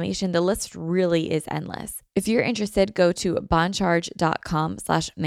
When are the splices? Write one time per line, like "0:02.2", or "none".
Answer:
0:01.9